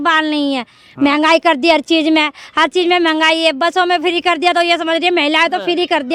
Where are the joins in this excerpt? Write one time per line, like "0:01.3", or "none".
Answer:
none